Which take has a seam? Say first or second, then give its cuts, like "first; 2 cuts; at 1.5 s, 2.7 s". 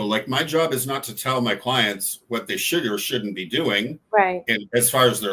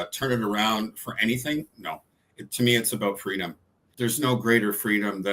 second; 1 cut; at 3.8 s